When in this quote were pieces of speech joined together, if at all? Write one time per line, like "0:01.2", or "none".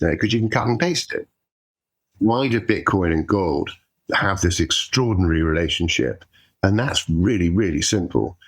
0:01.6